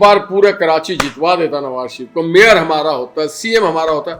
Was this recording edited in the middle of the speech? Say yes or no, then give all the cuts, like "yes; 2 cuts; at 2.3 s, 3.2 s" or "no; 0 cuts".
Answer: no; 0 cuts